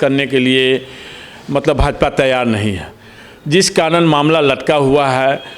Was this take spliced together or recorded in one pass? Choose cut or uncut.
uncut